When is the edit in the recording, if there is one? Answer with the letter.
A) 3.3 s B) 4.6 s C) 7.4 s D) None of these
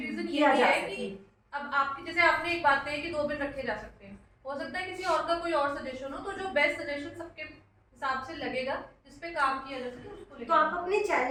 D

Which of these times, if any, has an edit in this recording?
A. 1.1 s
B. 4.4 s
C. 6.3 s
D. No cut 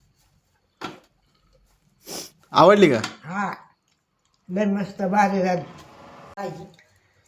C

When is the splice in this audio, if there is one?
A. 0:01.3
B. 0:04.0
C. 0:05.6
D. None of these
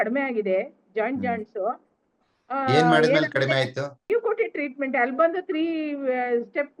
B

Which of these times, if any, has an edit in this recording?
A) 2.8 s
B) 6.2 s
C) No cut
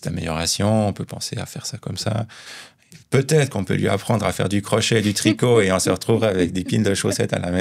A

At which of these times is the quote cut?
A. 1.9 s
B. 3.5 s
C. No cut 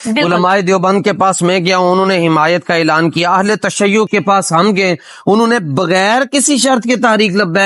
C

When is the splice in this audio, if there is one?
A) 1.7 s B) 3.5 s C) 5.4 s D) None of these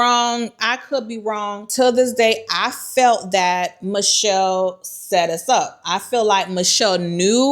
A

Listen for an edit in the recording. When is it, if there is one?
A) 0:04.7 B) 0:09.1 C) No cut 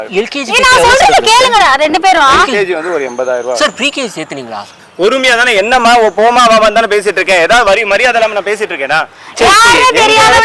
A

